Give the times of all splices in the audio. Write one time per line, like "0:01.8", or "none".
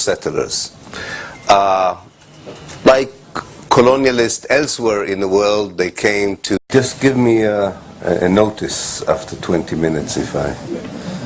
none